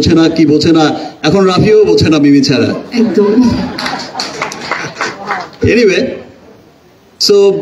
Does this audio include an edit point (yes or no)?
no